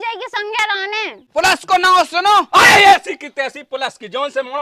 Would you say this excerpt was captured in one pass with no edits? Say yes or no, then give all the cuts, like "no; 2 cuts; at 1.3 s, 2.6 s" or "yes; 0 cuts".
no; 1 cut; at 1.2 s